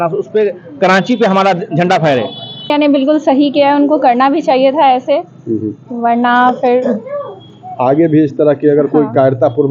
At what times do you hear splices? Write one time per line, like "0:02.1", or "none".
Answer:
0:02.7